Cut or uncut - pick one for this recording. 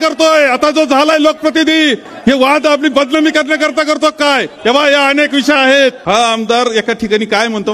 cut